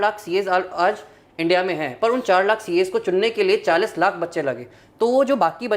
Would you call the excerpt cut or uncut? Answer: uncut